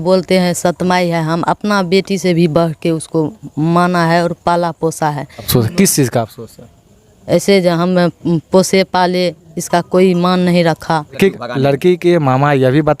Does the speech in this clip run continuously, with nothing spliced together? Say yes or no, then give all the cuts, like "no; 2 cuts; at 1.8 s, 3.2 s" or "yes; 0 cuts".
no; 2 cuts; at 5.5 s, 11.1 s